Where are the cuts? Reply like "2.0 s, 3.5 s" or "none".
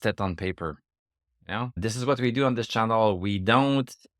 1.7 s